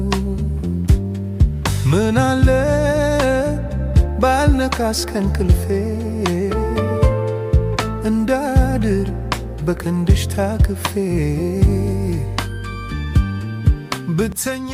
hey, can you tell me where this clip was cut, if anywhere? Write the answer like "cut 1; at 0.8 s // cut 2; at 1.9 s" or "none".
none